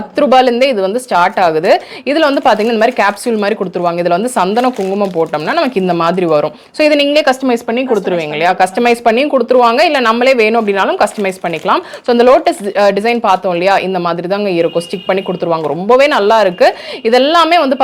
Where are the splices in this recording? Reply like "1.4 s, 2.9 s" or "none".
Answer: none